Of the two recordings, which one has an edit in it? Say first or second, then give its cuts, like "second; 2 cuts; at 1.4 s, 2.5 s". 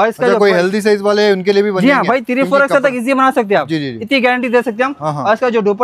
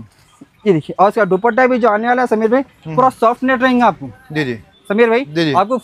second; 1 cut; at 4.7 s